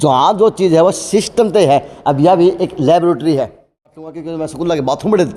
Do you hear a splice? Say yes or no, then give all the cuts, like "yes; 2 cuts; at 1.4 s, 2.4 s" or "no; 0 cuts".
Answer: yes; 1 cut; at 4.2 s